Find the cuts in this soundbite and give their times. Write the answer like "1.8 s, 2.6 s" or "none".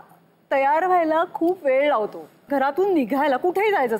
2.3 s